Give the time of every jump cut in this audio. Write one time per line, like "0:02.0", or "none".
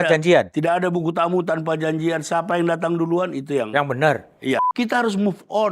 0:04.7